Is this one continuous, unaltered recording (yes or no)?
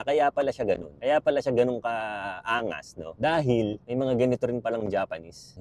no